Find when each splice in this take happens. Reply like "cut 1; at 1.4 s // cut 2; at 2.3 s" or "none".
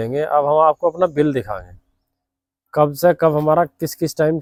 none